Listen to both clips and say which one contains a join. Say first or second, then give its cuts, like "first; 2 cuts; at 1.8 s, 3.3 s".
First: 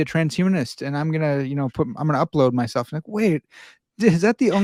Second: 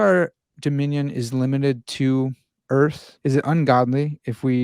second; 1 cut; at 3.1 s